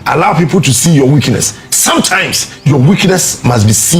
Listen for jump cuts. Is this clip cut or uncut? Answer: uncut